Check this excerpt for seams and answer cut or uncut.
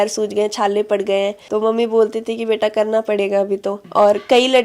uncut